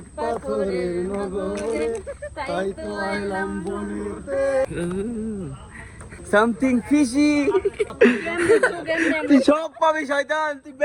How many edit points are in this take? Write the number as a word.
three